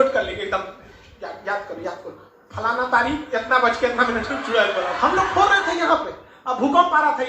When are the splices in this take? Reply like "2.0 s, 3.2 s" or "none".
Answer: 4.9 s